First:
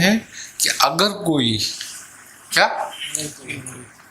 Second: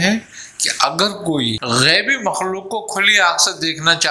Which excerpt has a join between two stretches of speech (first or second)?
second